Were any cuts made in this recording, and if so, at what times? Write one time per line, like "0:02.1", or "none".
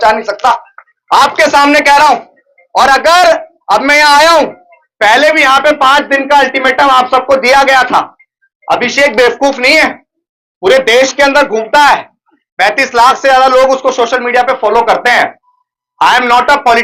none